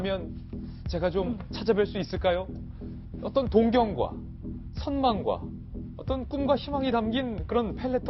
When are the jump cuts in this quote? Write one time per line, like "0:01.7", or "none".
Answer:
0:03.7